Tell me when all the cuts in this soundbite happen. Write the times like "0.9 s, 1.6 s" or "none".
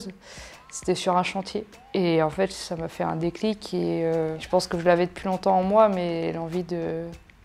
4.4 s

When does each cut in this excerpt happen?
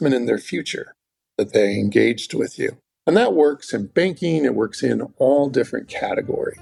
none

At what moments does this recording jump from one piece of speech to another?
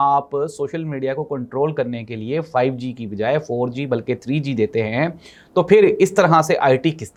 none

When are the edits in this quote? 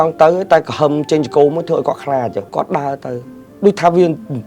2.4 s

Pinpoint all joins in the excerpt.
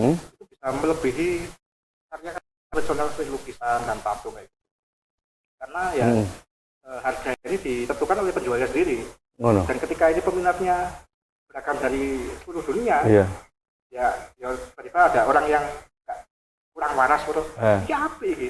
none

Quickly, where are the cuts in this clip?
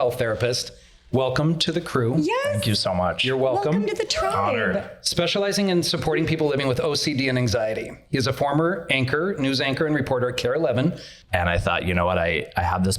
11.1 s

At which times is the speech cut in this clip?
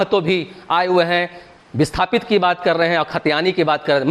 none

